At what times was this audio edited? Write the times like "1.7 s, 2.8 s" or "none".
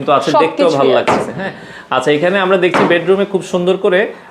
none